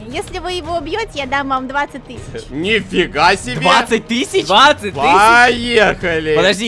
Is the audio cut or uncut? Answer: uncut